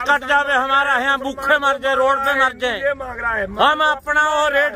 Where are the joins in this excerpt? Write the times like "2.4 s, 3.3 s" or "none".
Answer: none